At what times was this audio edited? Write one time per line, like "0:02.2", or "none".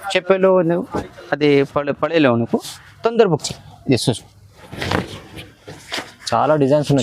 0:04.7